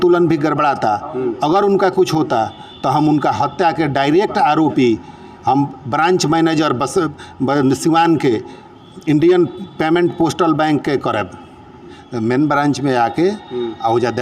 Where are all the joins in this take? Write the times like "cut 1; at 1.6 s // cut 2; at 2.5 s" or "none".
cut 1; at 12.0 s